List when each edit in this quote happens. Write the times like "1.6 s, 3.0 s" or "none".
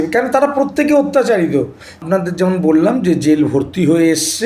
1.9 s